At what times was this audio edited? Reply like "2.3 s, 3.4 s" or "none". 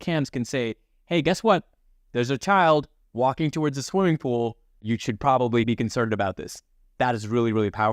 6.9 s